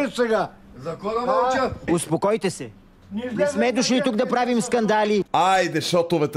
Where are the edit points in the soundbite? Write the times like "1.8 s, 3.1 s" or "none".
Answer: 1.9 s